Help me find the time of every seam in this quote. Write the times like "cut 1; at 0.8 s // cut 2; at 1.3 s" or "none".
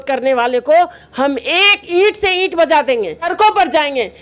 cut 1; at 3.3 s